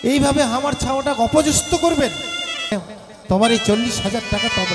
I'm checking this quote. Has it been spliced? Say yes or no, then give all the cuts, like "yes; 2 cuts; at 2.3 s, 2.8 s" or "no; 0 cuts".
yes; 1 cut; at 2.7 s